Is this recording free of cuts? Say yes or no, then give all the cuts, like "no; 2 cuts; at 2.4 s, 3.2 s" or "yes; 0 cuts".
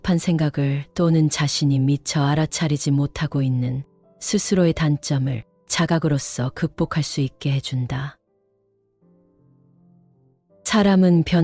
yes; 0 cuts